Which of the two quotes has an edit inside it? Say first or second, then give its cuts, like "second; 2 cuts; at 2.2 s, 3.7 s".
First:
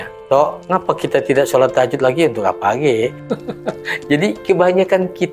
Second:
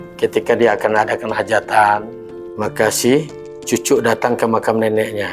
first; 1 cut; at 3.2 s